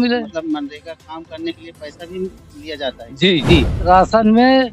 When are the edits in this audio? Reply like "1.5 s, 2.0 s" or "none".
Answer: 3.8 s